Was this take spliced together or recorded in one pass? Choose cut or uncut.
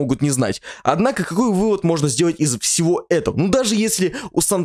uncut